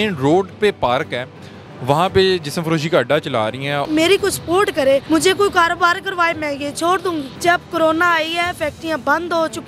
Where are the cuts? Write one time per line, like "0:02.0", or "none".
0:03.9
0:05.0
0:07.3